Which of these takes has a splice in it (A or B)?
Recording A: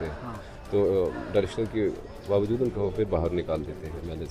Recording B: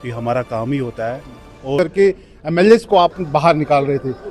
B